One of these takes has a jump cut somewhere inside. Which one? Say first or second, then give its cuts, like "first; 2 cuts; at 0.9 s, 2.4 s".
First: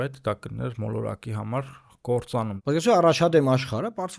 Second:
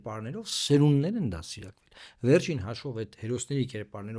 first; 1 cut; at 2.5 s